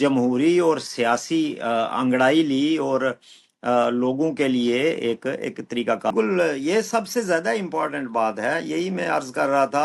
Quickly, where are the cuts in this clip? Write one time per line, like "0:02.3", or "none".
0:06.1